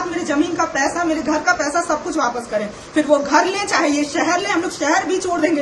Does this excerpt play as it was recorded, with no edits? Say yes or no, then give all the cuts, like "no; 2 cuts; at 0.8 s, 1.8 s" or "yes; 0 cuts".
yes; 0 cuts